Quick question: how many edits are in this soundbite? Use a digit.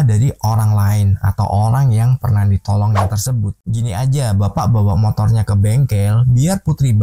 1